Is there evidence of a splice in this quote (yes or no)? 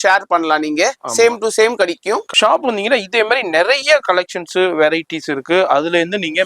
yes